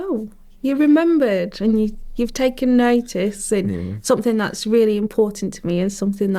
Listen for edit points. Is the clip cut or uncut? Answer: uncut